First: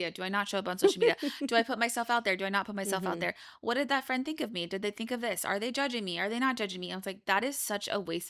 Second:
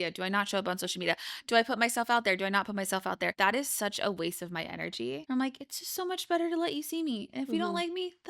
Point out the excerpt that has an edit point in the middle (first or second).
second